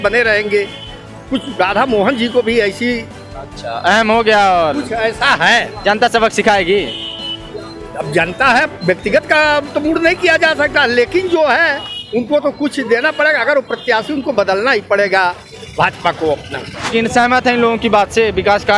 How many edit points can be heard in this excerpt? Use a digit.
1